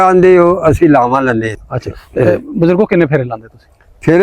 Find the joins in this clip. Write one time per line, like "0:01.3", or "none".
0:01.6